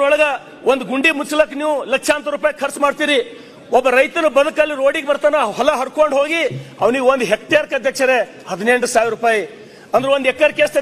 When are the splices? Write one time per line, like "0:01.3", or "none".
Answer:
none